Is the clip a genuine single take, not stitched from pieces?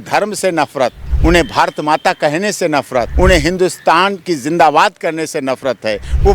no; 2 cuts; at 1.1 s, 3.1 s

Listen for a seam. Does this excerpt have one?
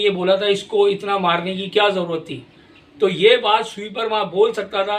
no; 0 cuts

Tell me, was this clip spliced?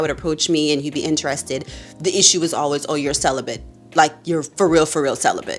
no; 0 cuts

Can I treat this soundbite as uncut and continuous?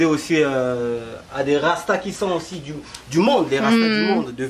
yes; 0 cuts

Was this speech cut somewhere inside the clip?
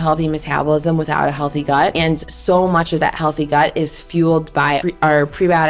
yes; 2 cuts; at 1.9 s, 4.8 s

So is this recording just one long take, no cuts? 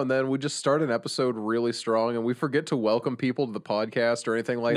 yes; 0 cuts

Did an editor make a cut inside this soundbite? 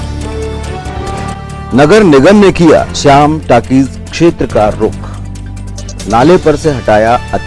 yes; 1 cut; at 1.1 s

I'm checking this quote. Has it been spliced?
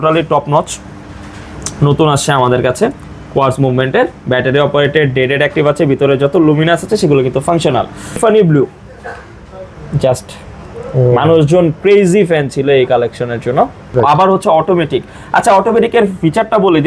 yes; 2 cuts; at 8.3 s, 13.8 s

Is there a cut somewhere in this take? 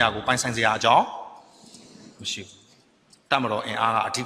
no; 0 cuts

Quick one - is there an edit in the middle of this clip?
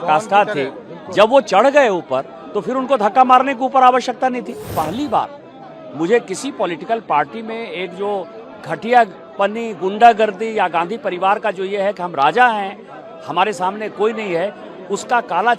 yes; 1 cut; at 4.7 s

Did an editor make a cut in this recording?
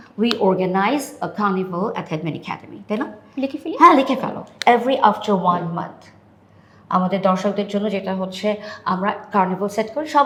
no; 0 cuts

